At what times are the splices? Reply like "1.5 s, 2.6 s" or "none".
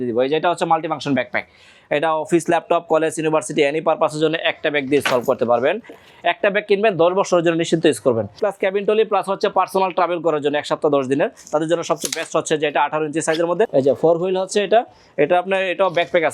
6.0 s, 8.4 s, 13.7 s